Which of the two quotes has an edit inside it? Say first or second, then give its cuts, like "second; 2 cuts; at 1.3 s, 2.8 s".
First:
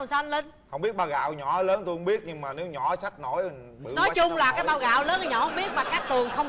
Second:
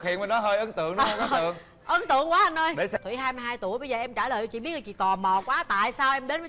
second; 1 cut; at 2.9 s